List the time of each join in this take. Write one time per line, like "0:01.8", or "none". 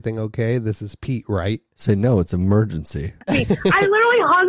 0:03.2